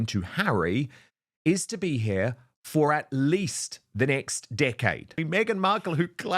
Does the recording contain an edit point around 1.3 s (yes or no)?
no